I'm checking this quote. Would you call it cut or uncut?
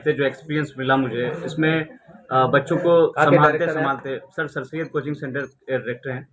uncut